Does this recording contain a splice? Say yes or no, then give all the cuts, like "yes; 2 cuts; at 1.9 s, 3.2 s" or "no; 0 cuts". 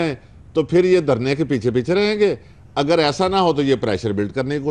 no; 0 cuts